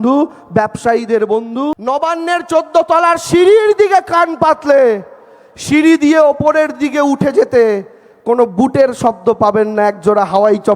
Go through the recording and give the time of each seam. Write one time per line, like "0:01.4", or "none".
0:01.7